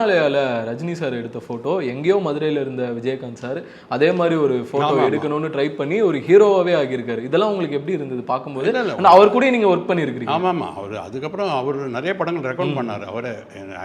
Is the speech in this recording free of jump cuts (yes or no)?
yes